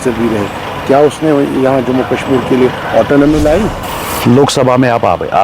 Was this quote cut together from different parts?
yes; 1 cut; at 3.8 s

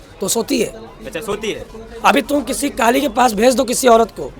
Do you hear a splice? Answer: no; 0 cuts

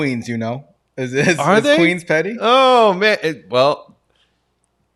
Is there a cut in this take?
no; 0 cuts

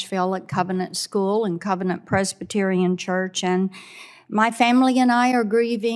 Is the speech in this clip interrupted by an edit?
no; 0 cuts

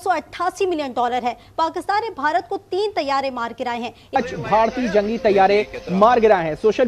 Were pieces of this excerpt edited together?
yes; 1 cut; at 4.2 s

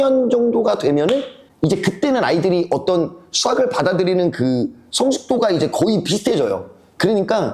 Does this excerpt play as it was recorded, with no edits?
no; 1 cut; at 1.4 s

